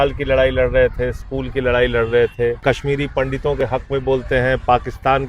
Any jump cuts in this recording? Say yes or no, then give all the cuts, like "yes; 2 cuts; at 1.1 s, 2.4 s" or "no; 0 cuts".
yes; 1 cut; at 2.6 s